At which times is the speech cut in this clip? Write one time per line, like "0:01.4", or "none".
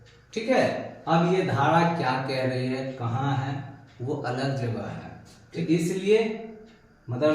0:00.9
0:05.6